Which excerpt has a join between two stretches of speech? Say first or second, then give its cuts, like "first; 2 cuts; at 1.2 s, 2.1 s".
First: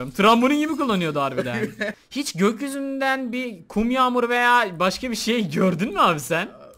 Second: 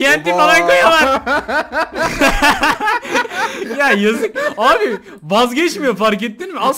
first; 1 cut; at 2.0 s